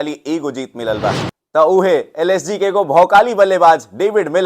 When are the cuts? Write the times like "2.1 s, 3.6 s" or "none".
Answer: 1.3 s